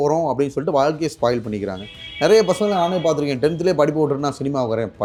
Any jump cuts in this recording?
no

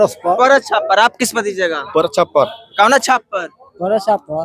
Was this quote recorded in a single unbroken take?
yes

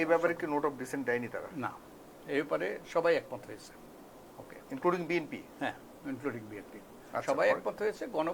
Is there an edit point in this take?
no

